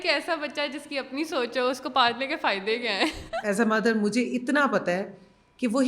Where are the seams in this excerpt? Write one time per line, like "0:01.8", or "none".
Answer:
0:03.3